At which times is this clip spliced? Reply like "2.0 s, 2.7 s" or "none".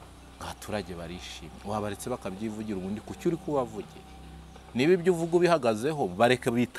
none